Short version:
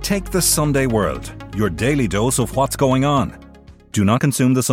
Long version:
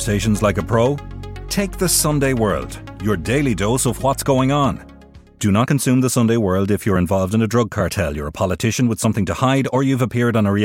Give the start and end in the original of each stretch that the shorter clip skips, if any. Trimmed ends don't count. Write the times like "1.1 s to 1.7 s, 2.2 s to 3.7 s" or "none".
none